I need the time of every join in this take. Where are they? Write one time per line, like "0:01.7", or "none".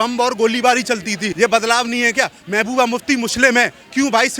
0:01.3